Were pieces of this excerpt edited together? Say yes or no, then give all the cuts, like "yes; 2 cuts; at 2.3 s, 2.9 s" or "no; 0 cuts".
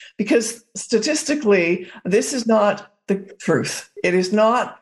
no; 0 cuts